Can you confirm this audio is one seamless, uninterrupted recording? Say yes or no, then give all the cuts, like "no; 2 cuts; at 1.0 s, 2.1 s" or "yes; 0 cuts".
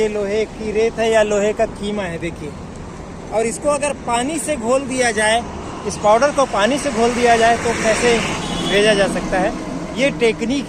yes; 0 cuts